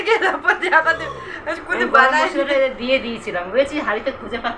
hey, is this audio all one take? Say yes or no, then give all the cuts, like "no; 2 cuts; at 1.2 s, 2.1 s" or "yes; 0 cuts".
yes; 0 cuts